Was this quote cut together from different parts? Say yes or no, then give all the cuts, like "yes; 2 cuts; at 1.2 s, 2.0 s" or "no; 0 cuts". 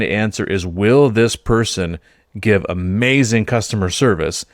no; 0 cuts